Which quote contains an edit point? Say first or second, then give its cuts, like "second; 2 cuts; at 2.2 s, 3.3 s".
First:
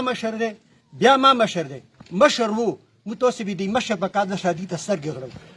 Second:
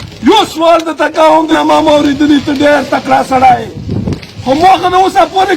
second; 1 cut; at 1.5 s